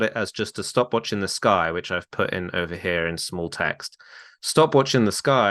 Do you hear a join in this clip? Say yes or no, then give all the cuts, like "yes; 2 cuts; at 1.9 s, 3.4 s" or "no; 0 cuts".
no; 0 cuts